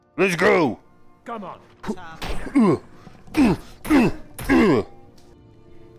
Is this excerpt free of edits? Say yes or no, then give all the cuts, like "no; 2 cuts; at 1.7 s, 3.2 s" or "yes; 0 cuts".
no; 1 cut; at 1.6 s